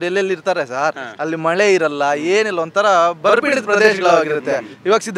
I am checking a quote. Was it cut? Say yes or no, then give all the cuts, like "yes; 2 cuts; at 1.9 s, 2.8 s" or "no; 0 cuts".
no; 0 cuts